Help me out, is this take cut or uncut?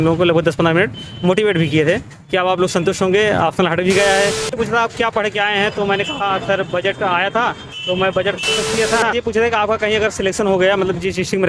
cut